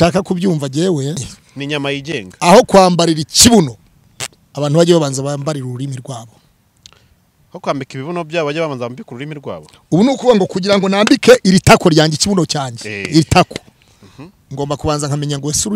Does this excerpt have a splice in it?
yes; 1 cut; at 1.4 s

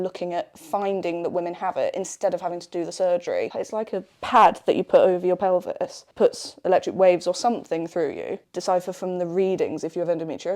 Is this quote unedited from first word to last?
no; 3 cuts; at 3.6 s, 6.0 s, 8.5 s

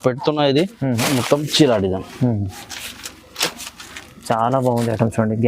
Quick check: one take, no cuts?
no; 1 cut; at 0.9 s

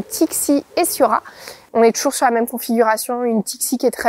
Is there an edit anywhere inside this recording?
no; 0 cuts

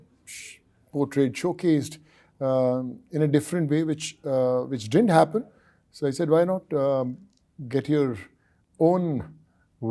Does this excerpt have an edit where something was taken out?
no; 0 cuts

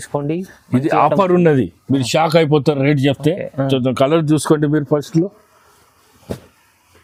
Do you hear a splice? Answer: no; 0 cuts

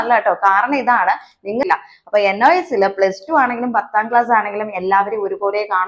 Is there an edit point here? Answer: yes; 1 cut; at 1.6 s

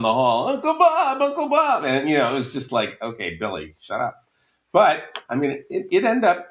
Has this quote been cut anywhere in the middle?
no; 0 cuts

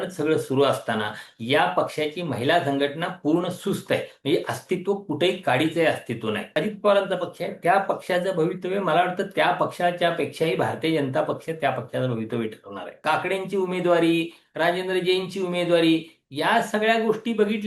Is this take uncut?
no; 2 cuts; at 6.5 s, 13.0 s

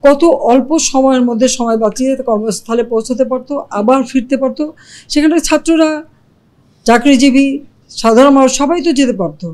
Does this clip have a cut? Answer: no; 0 cuts

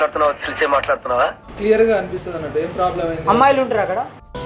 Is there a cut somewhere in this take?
yes; 1 cut; at 1.4 s

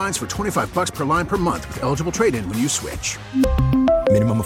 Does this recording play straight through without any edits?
yes; 0 cuts

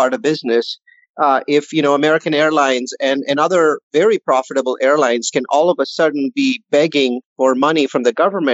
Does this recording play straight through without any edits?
no; 1 cut; at 7.2 s

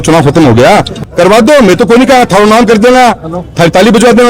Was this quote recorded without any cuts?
no; 1 cut; at 1.0 s

